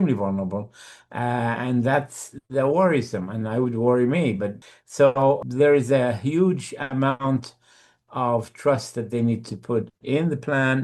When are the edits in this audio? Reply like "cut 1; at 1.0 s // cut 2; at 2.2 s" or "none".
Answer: cut 1; at 4.6 s // cut 2; at 5.5 s

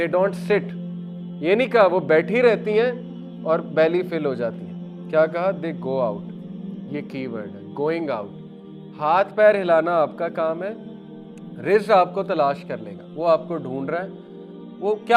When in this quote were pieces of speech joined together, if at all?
none

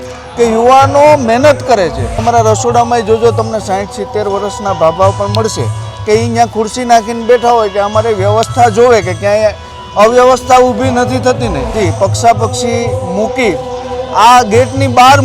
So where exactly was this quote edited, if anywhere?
cut 1; at 2.2 s // cut 2; at 11.7 s

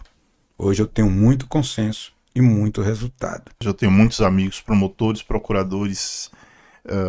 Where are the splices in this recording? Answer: cut 1; at 3.7 s

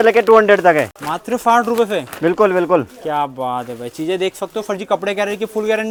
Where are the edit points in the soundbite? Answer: none

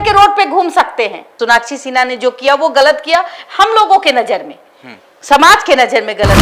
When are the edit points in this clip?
cut 1; at 1.3 s

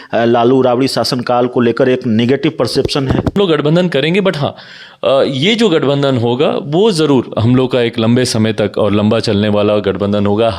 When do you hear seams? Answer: cut 1; at 3.3 s

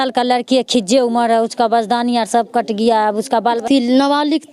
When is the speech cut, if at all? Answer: cut 1; at 3.6 s

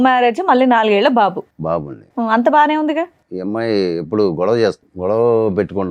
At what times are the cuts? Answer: cut 1; at 3.2 s // cut 2; at 4.9 s

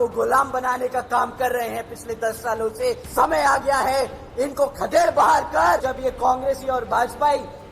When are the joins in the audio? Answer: cut 1; at 3.0 s // cut 2; at 5.8 s

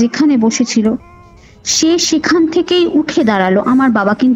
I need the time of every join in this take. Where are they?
none

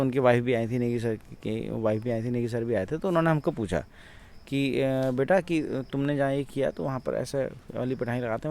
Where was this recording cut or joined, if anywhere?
none

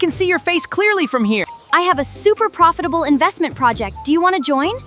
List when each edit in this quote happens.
cut 1; at 1.6 s

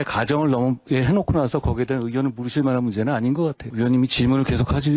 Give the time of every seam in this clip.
cut 1; at 3.7 s

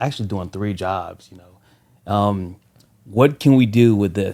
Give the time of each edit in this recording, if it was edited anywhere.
none

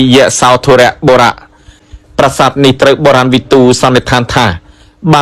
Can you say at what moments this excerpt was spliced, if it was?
cut 1; at 1.7 s

